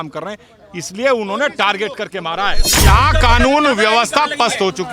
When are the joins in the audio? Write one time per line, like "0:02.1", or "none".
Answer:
0:02.8